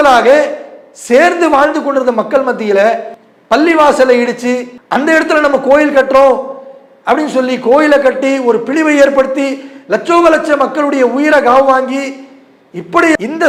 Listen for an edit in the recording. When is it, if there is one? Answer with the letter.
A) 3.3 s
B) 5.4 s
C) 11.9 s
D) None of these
D